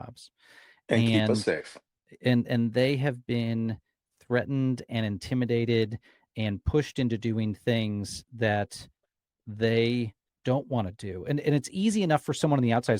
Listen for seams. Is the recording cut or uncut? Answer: uncut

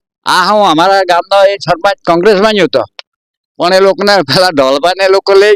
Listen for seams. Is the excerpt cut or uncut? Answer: uncut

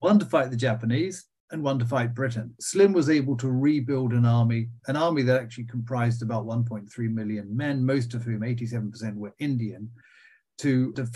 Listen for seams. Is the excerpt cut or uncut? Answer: cut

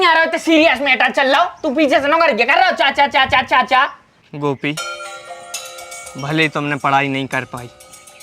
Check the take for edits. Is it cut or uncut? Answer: cut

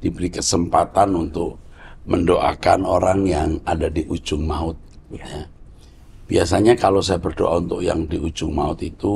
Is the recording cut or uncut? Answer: uncut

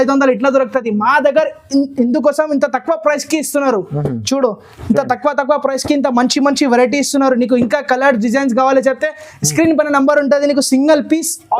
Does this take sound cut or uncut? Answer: uncut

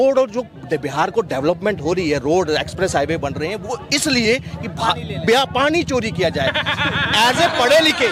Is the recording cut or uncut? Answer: uncut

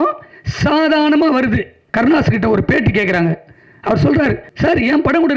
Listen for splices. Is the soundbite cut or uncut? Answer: cut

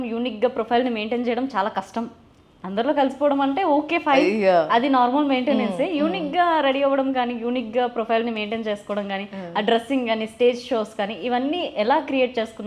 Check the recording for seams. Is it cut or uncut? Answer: uncut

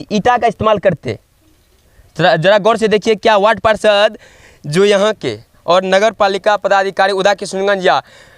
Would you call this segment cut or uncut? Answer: uncut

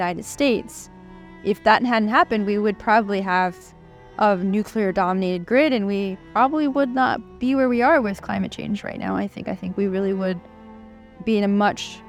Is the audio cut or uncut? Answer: uncut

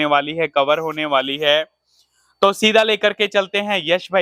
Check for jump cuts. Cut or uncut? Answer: uncut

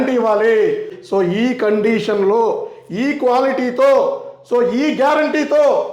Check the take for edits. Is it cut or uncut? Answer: cut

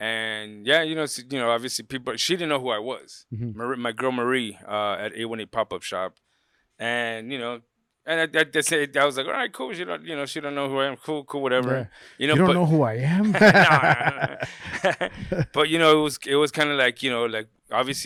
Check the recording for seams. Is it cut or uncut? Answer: uncut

